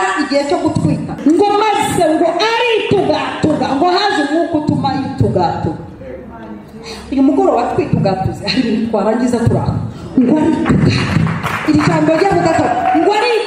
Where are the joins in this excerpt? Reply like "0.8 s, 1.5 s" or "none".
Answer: 1.1 s